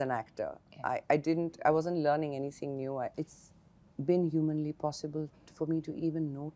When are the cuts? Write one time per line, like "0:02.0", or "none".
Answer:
0:03.1

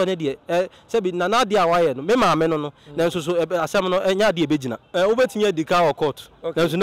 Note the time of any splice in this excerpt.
0:04.8

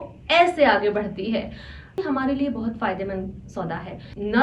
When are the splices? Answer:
0:02.0

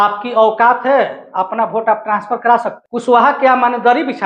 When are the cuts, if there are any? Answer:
0:02.8

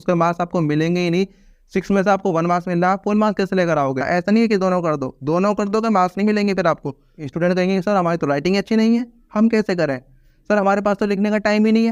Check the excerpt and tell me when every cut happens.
0:04.0
0:07.2

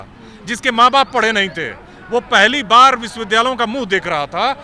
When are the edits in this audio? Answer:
none

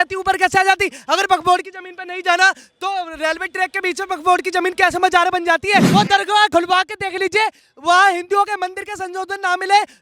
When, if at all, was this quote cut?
0:05.9

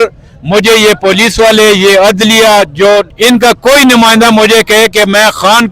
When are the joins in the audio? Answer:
0:03.1

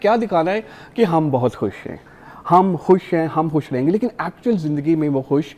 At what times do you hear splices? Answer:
none

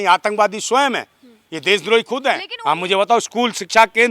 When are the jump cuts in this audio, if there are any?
0:02.5

